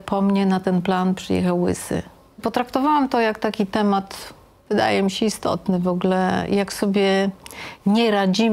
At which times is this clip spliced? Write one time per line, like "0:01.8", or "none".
0:02.4